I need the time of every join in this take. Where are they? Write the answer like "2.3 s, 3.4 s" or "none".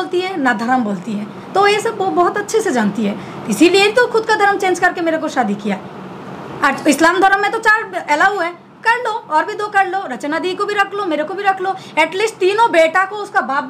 none